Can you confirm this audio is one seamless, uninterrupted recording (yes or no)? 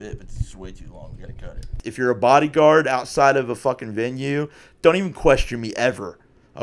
no